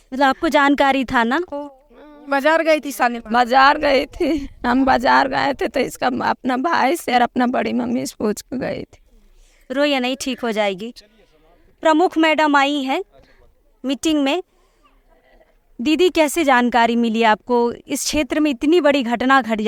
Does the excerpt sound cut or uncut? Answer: uncut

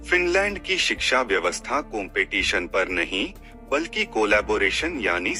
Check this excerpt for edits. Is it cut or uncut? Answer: uncut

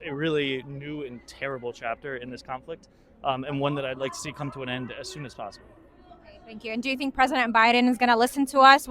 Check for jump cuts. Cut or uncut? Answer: uncut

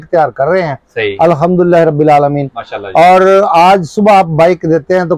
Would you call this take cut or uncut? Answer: uncut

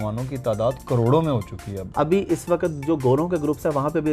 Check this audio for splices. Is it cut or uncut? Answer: cut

